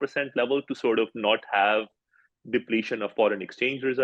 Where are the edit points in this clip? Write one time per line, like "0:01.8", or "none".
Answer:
none